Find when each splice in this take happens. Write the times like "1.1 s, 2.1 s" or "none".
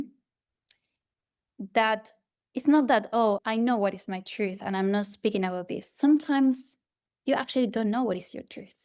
none